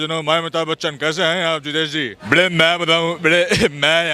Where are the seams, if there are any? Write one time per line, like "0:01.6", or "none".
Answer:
0:02.2